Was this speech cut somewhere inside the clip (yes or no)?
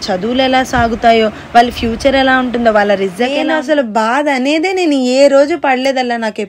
yes